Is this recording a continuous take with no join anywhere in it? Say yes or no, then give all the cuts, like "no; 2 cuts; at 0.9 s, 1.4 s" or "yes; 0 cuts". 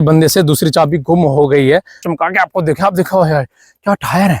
no; 1 cut; at 2.0 s